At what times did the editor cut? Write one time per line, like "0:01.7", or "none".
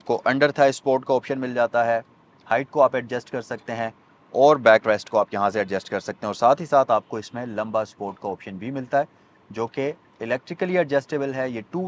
none